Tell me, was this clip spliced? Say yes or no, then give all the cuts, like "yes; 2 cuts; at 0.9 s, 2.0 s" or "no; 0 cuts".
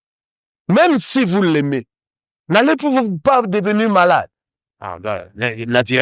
no; 0 cuts